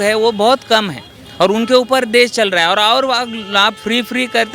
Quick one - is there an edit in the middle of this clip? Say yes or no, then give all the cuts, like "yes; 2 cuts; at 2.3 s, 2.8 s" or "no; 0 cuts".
no; 0 cuts